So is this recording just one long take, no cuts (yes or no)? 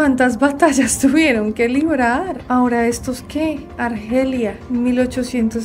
yes